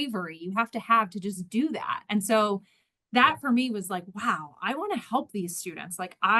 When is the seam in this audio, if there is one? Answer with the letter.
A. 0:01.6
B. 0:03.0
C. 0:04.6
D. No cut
D